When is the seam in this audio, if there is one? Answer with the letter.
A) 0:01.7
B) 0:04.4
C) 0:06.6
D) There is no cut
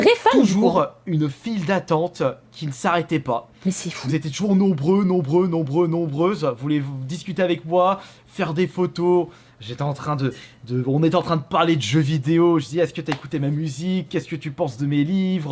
D